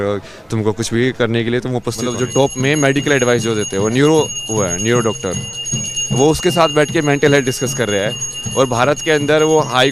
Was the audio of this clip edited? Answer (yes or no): yes